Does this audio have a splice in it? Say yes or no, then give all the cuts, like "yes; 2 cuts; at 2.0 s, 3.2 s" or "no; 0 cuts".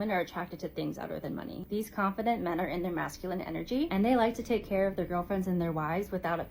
yes; 1 cut; at 2.3 s